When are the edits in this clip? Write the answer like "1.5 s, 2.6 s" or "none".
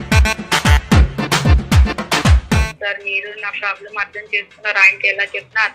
2.7 s